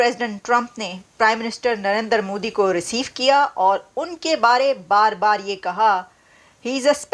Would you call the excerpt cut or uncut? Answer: uncut